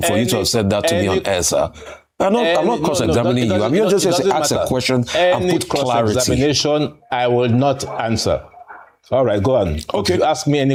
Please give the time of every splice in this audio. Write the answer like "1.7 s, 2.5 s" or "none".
none